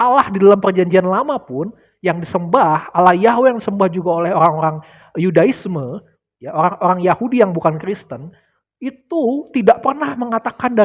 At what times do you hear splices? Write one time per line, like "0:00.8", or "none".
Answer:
none